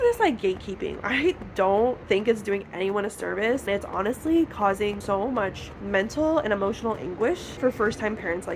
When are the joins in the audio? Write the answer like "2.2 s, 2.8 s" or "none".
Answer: 1.0 s, 3.7 s, 5.0 s, 7.5 s